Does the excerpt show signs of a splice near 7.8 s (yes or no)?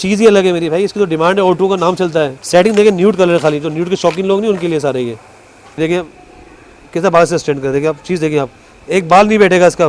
no